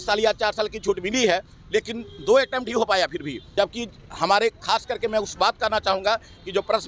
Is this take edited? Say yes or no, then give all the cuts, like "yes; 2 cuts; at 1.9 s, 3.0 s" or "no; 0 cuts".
yes; 1 cut; at 3.4 s